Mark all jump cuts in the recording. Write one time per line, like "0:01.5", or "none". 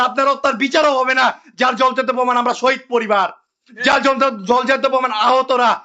none